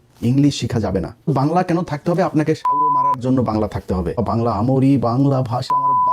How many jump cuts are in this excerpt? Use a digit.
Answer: 2